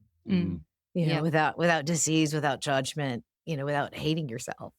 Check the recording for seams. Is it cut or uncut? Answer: cut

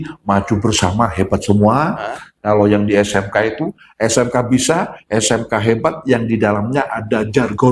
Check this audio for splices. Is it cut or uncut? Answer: uncut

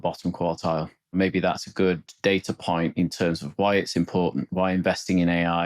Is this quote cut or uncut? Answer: cut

